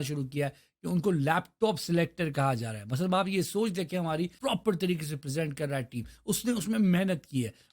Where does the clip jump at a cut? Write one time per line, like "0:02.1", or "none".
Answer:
0:04.3